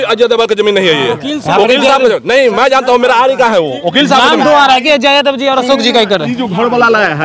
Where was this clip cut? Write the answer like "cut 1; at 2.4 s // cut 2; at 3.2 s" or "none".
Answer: none

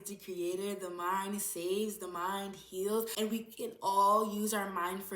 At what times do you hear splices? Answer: cut 1; at 3.1 s

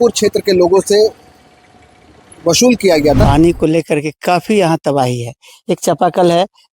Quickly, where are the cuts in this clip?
cut 1; at 3.2 s

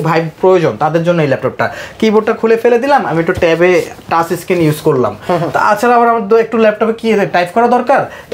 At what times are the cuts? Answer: none

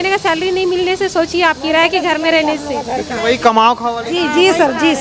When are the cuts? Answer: none

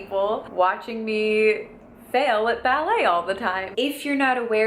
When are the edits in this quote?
cut 1; at 3.6 s

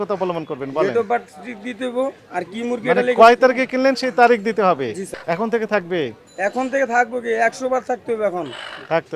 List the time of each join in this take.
cut 1; at 5.1 s

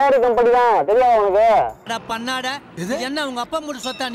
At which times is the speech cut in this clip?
cut 1; at 1.8 s

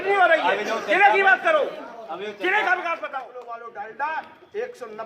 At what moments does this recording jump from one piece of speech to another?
cut 1; at 3.2 s

